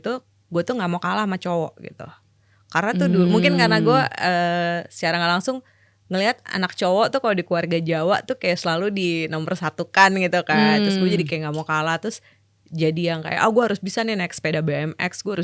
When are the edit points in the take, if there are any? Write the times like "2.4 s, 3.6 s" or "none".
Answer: none